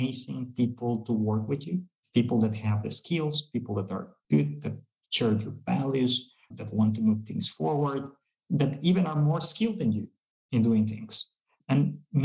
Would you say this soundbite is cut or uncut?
cut